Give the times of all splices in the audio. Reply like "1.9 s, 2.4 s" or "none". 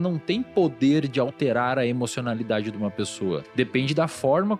3.5 s